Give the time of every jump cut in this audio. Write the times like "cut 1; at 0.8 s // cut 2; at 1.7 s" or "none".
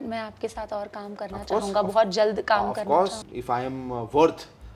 cut 1; at 3.2 s